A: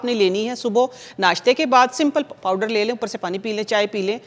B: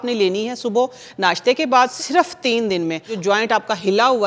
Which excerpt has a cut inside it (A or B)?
B